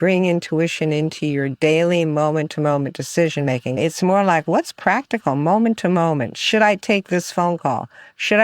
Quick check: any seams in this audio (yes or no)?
yes